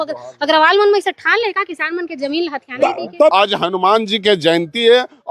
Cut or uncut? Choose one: cut